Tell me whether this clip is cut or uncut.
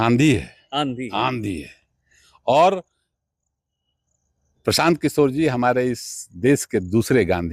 uncut